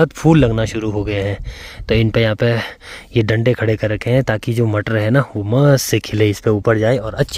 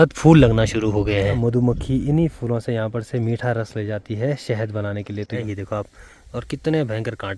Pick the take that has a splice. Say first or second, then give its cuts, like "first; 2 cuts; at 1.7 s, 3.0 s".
second; 2 cuts; at 1.4 s, 5.4 s